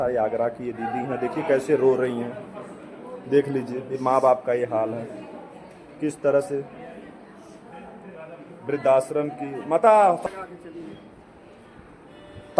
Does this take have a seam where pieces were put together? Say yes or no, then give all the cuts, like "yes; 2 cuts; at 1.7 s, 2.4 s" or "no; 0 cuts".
yes; 1 cut; at 10.2 s